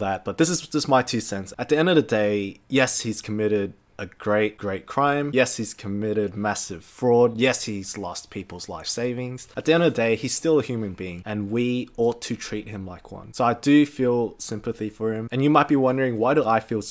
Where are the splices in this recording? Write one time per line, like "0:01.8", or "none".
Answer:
0:05.3
0:09.4
0:15.3